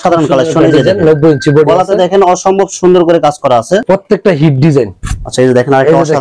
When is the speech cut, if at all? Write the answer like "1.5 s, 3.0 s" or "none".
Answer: 3.8 s